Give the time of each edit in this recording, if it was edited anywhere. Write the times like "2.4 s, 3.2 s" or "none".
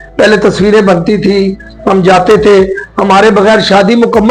none